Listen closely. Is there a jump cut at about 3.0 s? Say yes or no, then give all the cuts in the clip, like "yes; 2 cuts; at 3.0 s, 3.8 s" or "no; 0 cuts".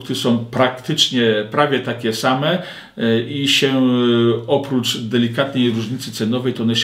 no; 0 cuts